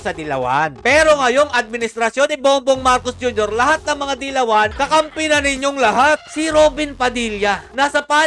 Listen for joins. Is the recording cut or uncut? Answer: cut